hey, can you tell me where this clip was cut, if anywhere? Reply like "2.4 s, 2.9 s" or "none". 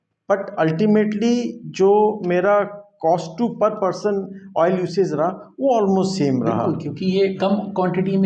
none